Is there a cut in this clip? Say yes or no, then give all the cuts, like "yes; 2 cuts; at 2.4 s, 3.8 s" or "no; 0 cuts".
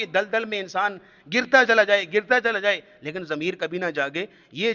no; 0 cuts